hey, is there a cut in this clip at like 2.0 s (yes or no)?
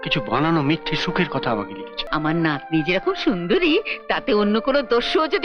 yes